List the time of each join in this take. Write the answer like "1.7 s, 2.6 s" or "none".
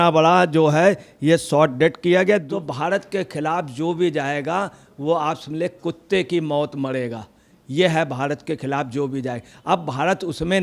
2.5 s